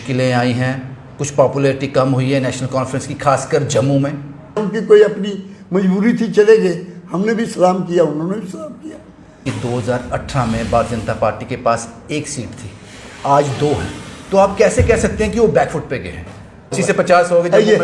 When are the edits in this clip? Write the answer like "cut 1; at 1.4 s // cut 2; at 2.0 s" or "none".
cut 1; at 4.6 s // cut 2; at 9.4 s // cut 3; at 16.7 s